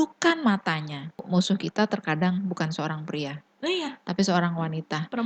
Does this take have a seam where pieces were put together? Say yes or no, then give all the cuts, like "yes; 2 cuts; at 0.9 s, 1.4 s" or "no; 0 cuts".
yes; 1 cut; at 1.2 s